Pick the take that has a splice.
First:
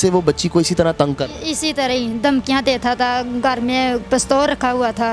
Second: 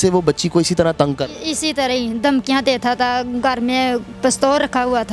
first; 1 cut; at 4.0 s

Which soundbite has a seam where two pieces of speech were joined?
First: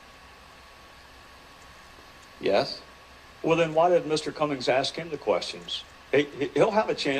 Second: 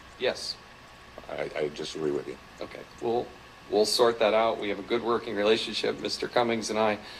first; 1 cut; at 3.9 s

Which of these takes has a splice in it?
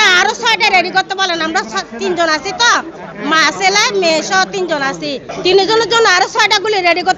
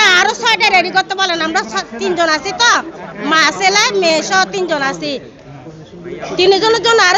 first; 1 cut; at 5.3 s

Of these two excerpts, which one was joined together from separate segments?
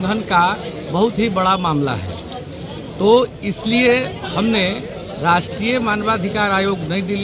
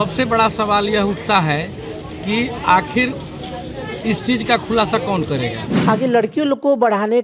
second; 1 cut; at 5.8 s

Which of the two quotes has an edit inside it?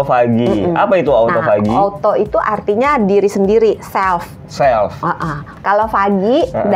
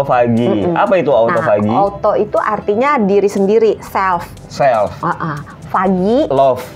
first; 1 cut; at 5.5 s

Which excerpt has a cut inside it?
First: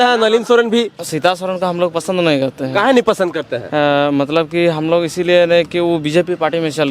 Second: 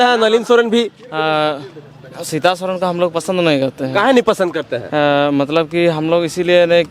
first; 1 cut; at 1.0 s

